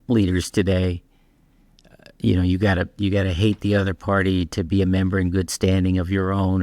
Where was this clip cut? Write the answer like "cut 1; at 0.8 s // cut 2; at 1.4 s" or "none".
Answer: none